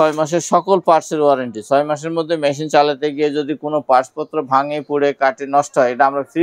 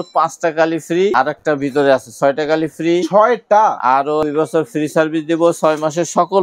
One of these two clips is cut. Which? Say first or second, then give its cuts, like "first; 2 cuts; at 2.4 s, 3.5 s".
second; 2 cuts; at 1.1 s, 4.2 s